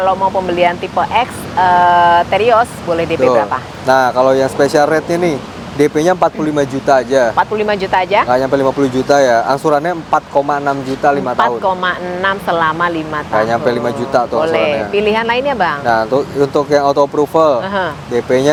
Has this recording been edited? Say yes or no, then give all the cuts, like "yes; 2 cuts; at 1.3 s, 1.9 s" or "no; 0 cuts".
no; 0 cuts